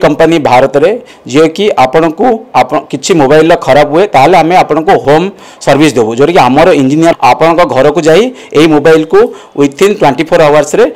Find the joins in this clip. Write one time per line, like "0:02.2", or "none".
0:05.0
0:07.1